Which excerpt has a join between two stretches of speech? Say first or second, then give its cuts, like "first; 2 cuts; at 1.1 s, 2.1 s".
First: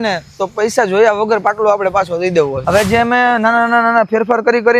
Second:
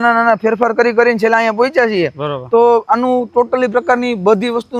first; 1 cut; at 2.6 s